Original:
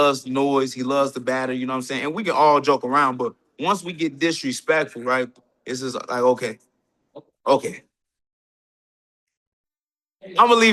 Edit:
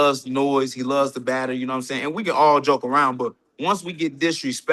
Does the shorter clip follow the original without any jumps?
yes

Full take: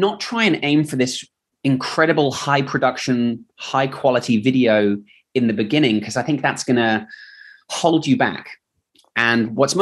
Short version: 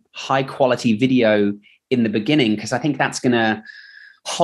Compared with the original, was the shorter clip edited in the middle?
no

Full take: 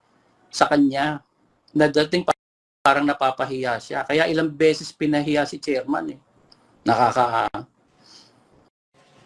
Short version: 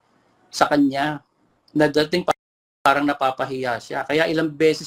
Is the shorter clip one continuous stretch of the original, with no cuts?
yes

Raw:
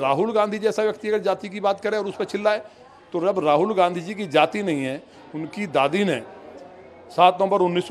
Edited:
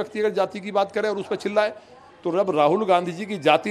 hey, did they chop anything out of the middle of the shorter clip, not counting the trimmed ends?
no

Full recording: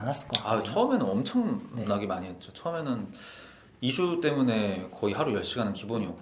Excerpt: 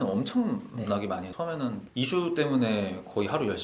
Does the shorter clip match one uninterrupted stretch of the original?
no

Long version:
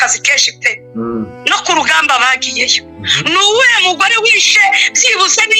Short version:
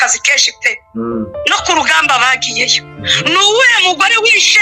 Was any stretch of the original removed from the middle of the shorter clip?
no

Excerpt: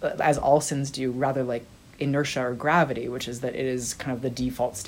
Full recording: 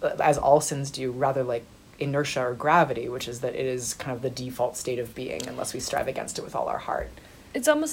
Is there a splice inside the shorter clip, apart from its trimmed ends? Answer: no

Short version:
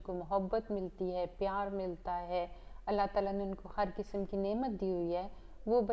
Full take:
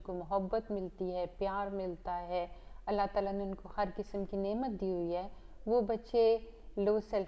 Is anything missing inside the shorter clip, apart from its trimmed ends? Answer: no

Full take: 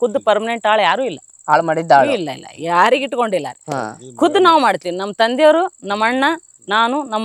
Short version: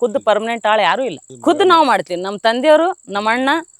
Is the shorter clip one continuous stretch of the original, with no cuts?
no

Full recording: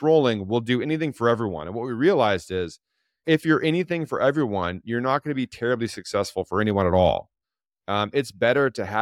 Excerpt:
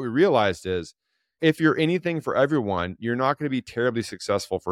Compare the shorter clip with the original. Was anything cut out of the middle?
no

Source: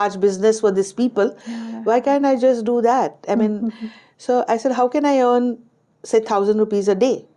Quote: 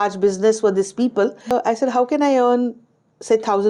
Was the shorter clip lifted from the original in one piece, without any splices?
no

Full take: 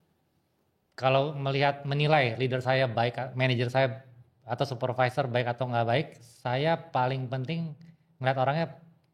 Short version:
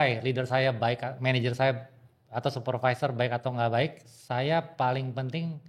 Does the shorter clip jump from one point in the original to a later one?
no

